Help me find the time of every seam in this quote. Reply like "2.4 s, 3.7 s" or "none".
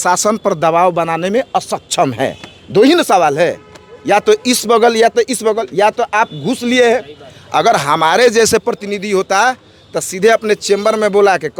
none

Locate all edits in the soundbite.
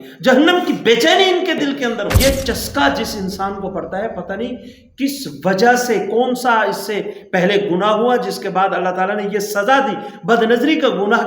2.2 s

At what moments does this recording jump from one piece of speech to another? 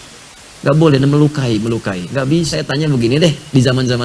2.6 s

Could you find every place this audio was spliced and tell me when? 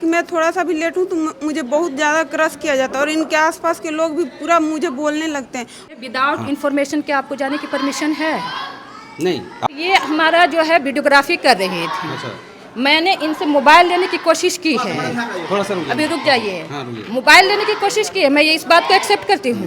5.9 s, 9.7 s

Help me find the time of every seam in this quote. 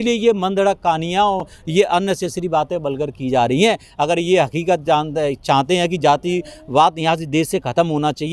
none

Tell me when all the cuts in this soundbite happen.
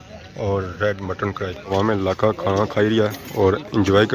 1.7 s

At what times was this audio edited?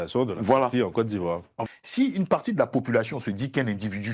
1.5 s

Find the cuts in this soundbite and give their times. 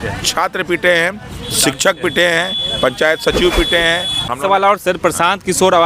4.3 s

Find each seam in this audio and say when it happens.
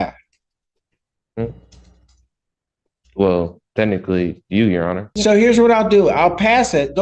5.1 s

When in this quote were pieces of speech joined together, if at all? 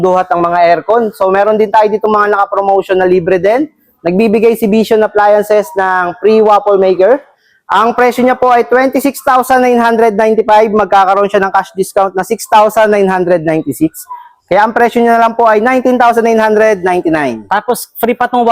none

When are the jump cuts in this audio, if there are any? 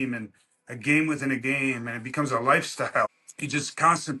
3.2 s

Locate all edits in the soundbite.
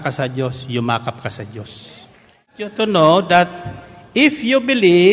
2.6 s

